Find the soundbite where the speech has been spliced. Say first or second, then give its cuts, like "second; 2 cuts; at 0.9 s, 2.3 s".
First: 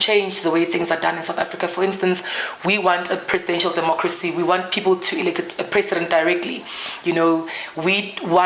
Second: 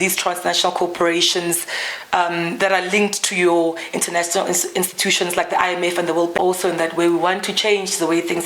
second; 1 cut; at 6.3 s